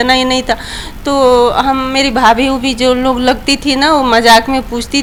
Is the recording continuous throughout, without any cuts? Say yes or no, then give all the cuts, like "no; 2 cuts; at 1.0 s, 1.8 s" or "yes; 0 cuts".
yes; 0 cuts